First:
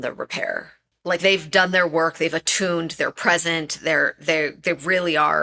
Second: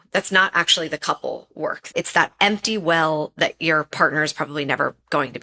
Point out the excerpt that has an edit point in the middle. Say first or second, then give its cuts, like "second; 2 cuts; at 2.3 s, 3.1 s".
first; 1 cut; at 0.9 s